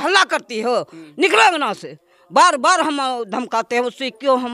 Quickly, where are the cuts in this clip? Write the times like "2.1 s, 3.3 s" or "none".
none